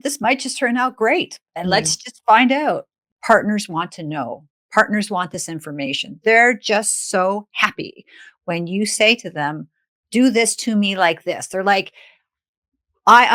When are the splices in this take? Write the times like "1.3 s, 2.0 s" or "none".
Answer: 3.0 s